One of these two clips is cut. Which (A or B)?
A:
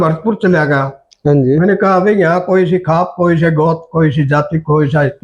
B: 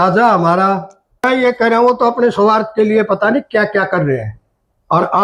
B